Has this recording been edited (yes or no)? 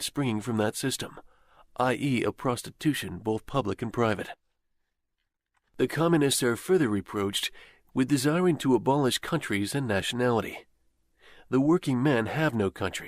yes